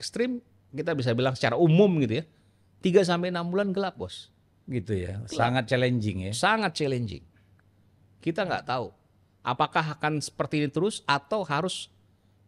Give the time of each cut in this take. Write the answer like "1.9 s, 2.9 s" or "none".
none